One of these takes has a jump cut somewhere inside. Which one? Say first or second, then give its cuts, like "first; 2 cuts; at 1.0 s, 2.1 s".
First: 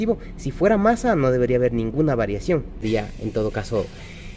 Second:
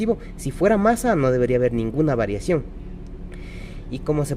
first; 1 cut; at 2.8 s